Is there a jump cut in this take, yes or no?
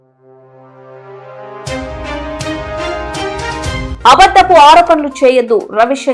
no